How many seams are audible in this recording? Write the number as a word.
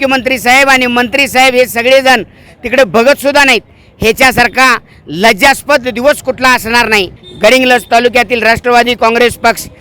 one